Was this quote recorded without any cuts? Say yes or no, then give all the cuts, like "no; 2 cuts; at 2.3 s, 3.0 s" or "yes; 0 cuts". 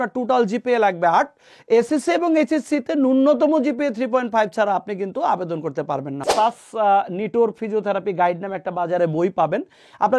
no; 1 cut; at 6.3 s